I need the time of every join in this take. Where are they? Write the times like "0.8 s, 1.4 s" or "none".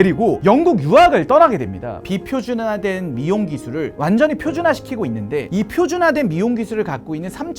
2.0 s

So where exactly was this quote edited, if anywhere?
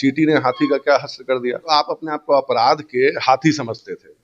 1.7 s

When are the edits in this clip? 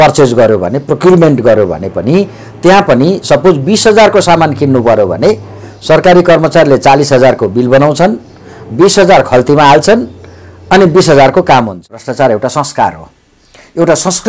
12.0 s

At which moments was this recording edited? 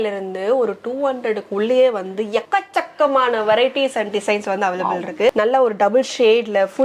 5.3 s

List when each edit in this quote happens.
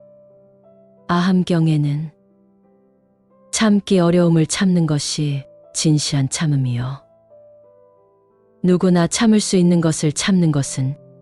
1.1 s

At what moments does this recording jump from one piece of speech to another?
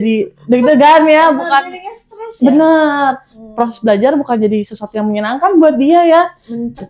none

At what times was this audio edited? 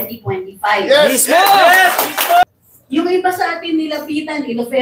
2.4 s

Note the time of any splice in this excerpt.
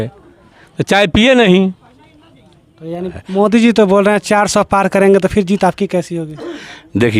3.0 s

